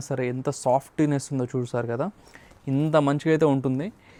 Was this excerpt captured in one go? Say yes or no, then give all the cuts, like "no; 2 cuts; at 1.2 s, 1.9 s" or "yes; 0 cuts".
yes; 0 cuts